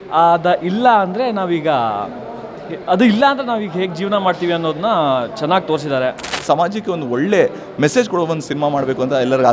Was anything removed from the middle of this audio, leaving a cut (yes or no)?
yes